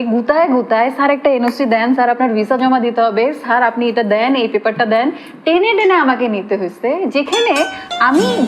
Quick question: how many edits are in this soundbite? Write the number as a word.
zero